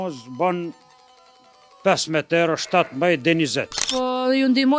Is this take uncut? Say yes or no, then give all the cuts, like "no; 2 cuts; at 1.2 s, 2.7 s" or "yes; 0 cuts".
no; 1 cut; at 3.8 s